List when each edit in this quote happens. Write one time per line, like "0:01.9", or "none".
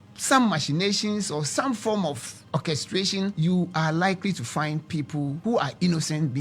0:02.3
0:03.3
0:05.4